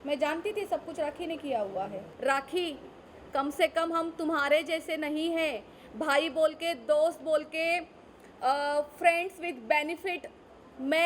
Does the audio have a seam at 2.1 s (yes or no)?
yes